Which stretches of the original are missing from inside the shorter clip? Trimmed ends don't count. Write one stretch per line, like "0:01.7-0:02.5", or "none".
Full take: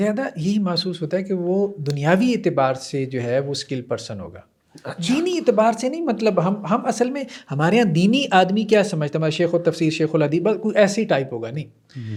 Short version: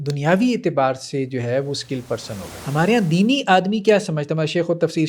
0:04.3-0:07.4